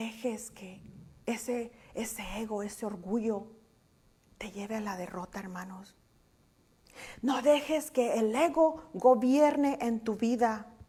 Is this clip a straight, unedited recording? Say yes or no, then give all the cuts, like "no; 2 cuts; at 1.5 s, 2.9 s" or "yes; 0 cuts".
yes; 0 cuts